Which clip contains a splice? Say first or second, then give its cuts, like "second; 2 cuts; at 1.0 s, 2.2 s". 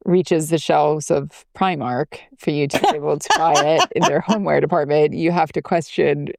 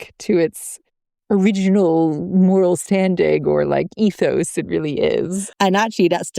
second; 1 cut; at 5.4 s